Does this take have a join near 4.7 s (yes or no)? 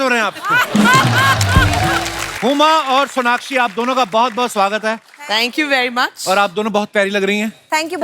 no